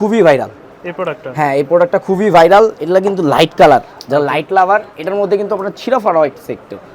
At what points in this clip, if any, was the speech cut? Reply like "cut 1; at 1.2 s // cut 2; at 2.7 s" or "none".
none